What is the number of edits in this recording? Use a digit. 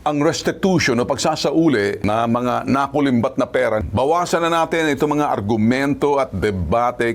2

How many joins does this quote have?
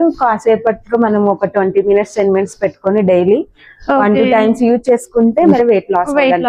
1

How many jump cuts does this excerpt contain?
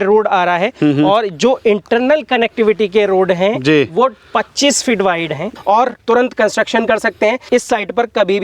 2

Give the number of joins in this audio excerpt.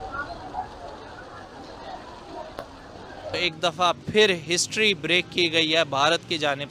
1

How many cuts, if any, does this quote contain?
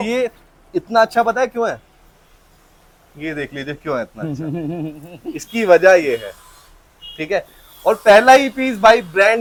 0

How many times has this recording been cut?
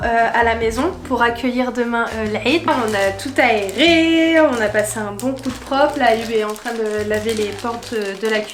0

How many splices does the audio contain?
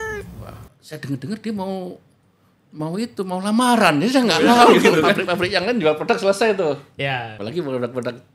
2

